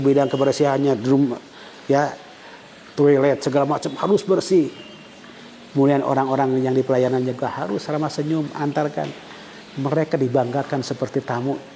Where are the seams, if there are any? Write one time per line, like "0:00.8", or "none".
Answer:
none